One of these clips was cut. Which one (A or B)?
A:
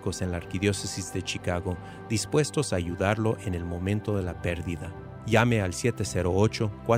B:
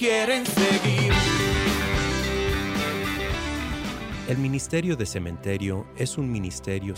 B